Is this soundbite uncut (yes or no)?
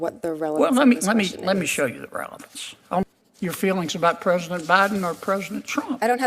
no